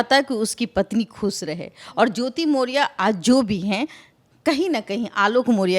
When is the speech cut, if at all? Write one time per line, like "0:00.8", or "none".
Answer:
none